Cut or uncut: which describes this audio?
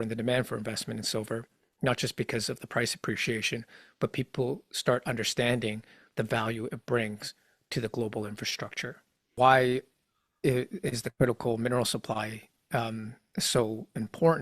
cut